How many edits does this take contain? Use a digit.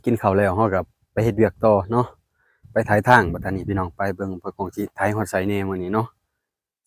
0